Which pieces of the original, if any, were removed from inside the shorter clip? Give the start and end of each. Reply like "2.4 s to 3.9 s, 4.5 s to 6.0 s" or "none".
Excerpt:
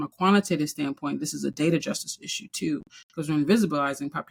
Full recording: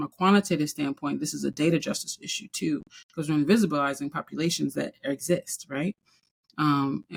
none